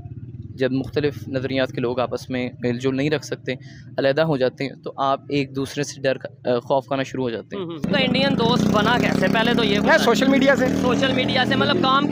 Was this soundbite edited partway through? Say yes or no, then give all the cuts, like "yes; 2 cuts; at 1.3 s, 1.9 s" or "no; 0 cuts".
yes; 1 cut; at 7.9 s